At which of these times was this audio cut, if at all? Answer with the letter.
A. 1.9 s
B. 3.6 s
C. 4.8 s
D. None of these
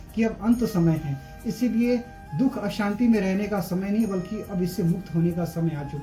D